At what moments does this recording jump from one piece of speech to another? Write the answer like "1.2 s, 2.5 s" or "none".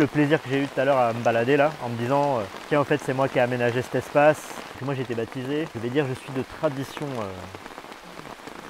2.5 s, 4.6 s